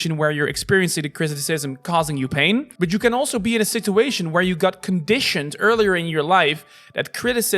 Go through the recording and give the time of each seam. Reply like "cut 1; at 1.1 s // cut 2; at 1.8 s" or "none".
cut 1; at 2.7 s